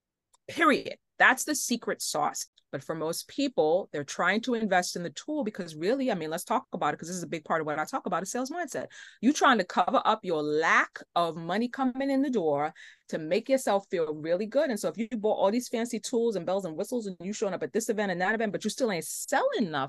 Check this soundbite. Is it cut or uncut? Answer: cut